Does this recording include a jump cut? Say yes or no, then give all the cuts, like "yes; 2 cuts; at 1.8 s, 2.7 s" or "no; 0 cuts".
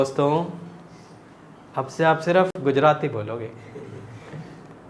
no; 0 cuts